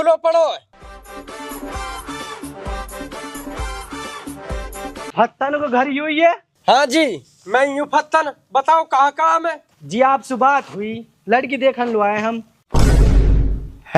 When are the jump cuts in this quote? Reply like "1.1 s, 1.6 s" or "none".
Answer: none